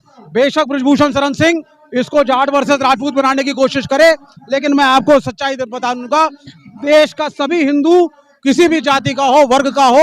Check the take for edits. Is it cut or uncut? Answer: uncut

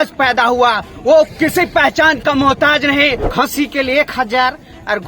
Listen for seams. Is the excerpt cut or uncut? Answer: cut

